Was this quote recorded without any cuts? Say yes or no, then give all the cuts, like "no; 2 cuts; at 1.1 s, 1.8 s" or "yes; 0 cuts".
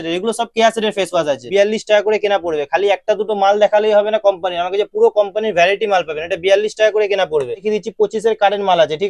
no; 2 cuts; at 1.4 s, 7.6 s